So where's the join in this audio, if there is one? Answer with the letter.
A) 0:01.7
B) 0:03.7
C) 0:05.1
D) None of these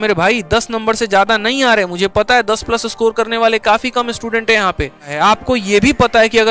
C